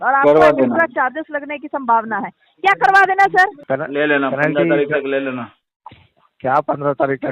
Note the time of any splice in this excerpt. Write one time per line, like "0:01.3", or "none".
0:03.6